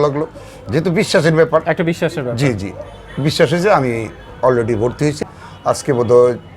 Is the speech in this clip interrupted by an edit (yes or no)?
yes